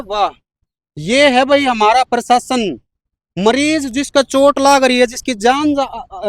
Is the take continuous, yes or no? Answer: yes